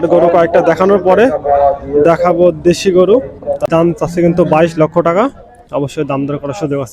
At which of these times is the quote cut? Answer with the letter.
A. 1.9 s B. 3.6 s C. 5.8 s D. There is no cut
B